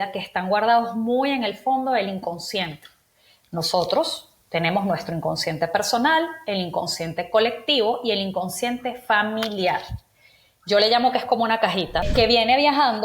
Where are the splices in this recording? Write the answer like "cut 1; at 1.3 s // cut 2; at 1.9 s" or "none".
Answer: cut 1; at 12.1 s